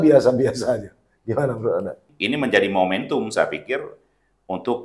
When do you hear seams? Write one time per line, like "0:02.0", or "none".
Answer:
0:02.1